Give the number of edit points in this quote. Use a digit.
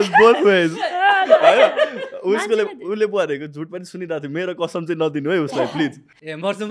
0